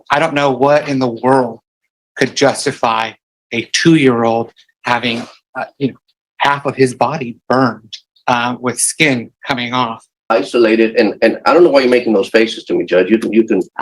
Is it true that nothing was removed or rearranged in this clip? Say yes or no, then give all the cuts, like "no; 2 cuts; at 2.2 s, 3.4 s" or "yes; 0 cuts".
no; 2 cuts; at 5.4 s, 10.2 s